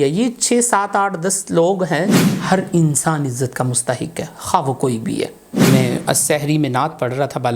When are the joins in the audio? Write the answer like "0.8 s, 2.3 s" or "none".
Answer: 2.1 s, 5.4 s